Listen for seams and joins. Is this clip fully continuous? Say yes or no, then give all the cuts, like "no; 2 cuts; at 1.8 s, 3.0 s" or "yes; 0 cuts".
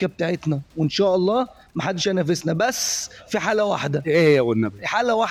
yes; 0 cuts